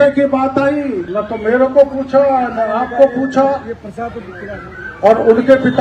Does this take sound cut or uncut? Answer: cut